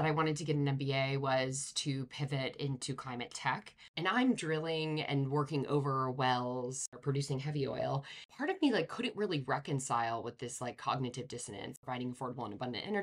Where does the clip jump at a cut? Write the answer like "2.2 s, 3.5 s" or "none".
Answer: 3.8 s, 8.3 s, 11.8 s